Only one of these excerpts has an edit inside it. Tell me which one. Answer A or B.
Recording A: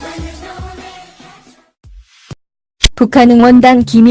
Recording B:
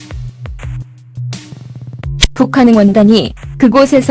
B